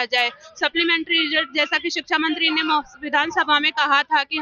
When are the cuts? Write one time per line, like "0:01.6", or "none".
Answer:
none

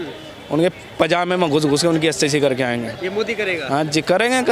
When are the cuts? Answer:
0:03.0

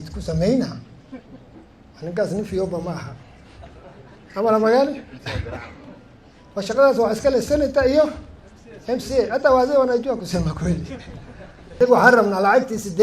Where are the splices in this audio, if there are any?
0:11.8

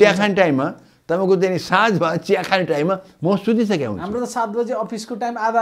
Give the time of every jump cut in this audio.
none

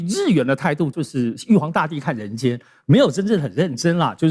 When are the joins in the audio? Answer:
0:01.0

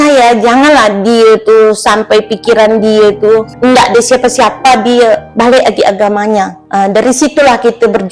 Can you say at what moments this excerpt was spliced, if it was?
0:03.5
0:05.3
0:06.6

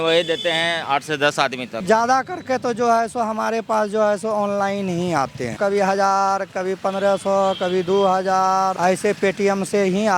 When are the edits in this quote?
0:01.8
0:05.5
0:08.7

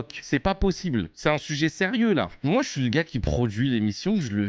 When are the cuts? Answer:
0:02.3

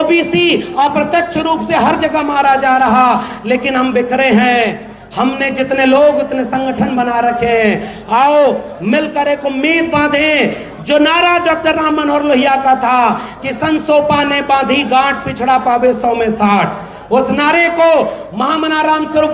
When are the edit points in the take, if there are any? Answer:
none

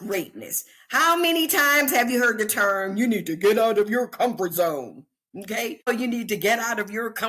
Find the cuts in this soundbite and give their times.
0:05.9

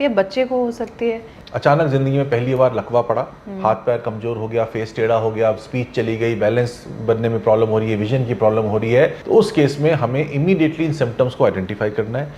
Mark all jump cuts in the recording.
0:01.3
0:09.2

